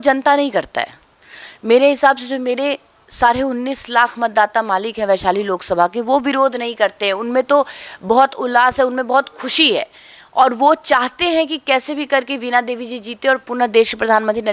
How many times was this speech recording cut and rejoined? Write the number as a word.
zero